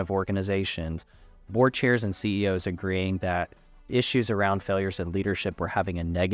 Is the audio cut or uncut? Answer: uncut